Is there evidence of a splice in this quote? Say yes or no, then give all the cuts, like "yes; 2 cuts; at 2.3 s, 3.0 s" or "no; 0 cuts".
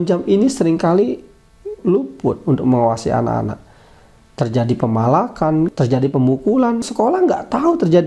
yes; 3 cuts; at 1.8 s, 5.7 s, 6.8 s